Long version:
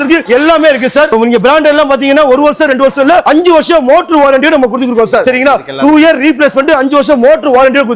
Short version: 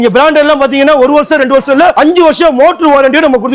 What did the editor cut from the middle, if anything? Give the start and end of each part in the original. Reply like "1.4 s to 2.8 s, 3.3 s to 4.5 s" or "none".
none